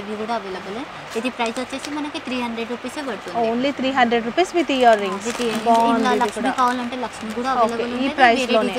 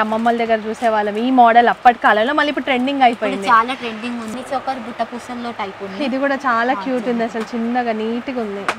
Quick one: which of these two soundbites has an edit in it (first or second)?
second